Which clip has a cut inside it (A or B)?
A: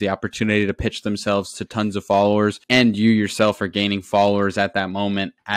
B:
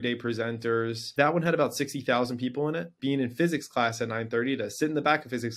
B